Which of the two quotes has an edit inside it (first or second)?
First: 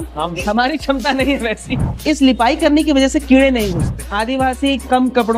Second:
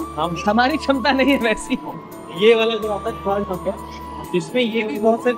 first